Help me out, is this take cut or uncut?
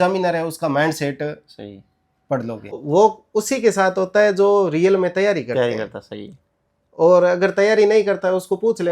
cut